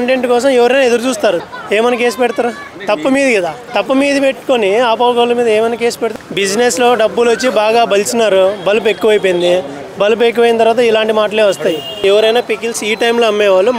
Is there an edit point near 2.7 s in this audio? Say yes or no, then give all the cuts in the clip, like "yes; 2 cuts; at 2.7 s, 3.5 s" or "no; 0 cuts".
yes; 5 cuts; at 1.4 s, 2.7 s, 3.6 s, 6.0 s, 12.0 s